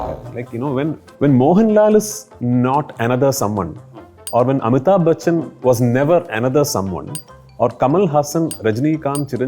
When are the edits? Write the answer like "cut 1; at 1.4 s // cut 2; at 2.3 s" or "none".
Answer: cut 1; at 1.1 s